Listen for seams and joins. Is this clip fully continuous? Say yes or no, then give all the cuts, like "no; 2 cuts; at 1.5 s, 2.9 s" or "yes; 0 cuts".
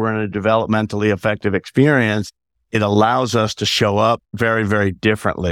no; 1 cut; at 4.3 s